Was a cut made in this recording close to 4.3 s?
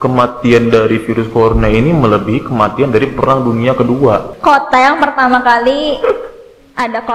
yes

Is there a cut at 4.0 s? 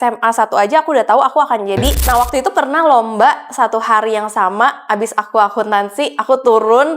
no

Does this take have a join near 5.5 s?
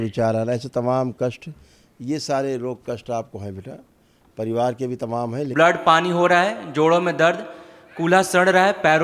yes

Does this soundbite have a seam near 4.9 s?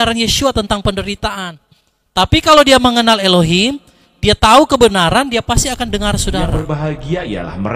no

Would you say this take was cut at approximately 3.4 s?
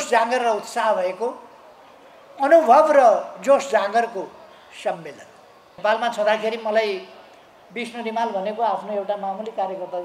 no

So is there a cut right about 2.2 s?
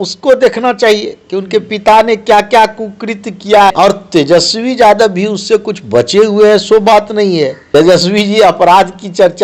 no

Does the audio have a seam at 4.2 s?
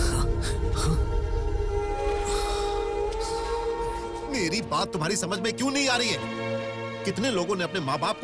yes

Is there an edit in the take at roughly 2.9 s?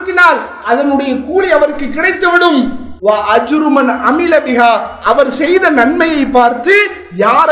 yes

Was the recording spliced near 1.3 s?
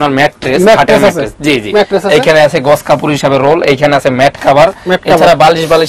no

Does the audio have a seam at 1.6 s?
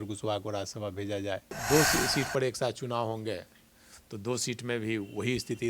yes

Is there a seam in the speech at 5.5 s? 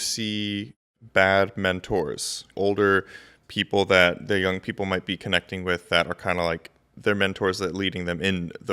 no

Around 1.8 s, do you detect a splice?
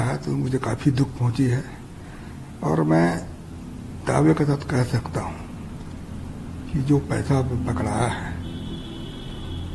no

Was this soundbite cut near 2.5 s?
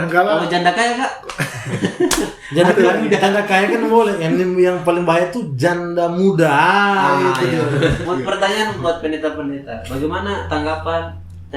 no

